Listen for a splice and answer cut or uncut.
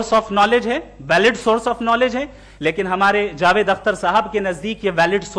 uncut